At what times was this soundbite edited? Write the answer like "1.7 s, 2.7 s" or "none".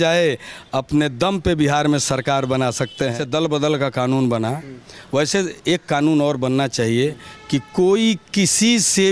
3.1 s